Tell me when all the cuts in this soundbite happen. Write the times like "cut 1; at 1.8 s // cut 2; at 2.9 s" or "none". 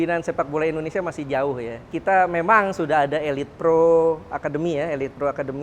cut 1; at 1.9 s